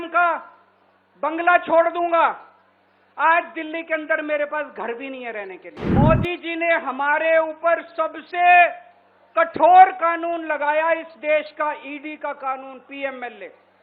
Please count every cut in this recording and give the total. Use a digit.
1